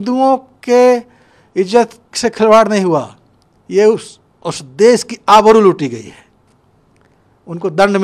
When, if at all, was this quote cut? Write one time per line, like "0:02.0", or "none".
none